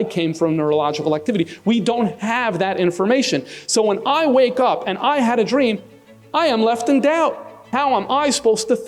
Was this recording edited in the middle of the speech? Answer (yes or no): yes